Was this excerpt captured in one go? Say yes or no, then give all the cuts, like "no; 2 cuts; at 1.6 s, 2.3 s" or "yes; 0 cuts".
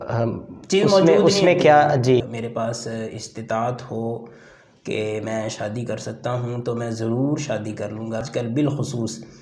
no; 2 cuts; at 2.2 s, 8.2 s